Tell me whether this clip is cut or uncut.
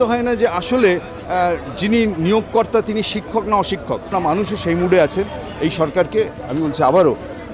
cut